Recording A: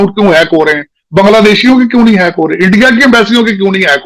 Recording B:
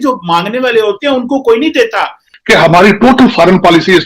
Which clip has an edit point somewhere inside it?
B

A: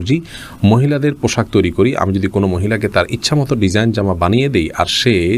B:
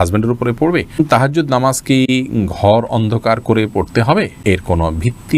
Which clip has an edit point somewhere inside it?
B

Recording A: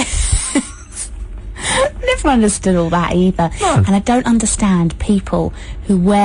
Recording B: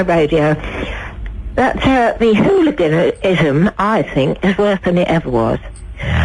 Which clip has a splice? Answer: A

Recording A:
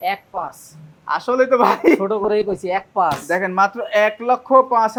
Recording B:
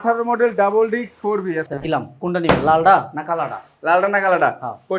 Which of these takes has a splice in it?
B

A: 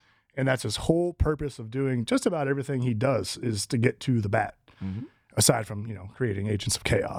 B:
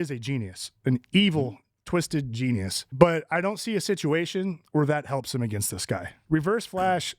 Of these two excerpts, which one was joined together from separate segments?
B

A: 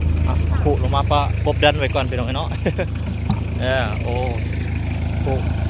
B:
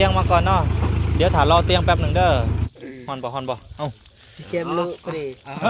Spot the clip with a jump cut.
B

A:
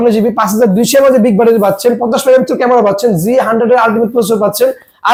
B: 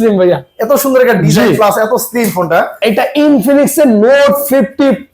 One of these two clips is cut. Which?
B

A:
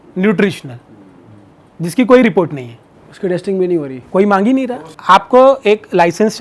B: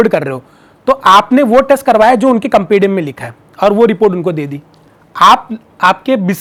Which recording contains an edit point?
A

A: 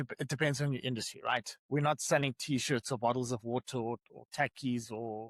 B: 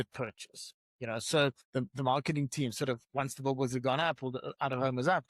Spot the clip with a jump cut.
B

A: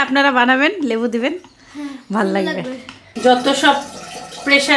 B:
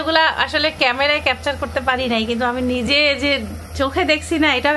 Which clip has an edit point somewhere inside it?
A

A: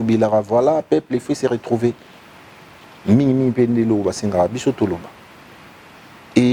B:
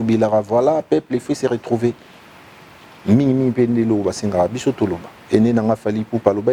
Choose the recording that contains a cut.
B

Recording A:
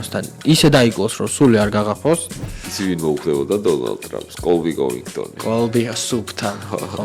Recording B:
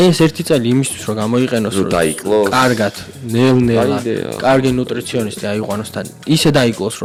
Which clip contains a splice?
A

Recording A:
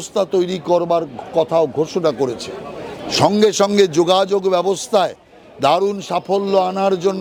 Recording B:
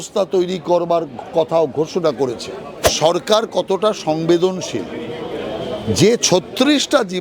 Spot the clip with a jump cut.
B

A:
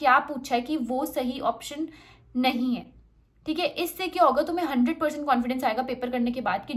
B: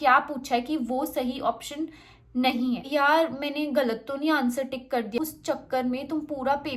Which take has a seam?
B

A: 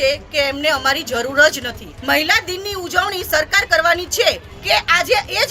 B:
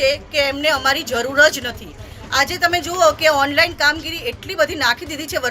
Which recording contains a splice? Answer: A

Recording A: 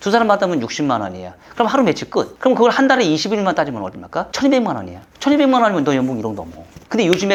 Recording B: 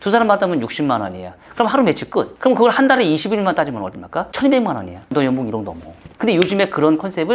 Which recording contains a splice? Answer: B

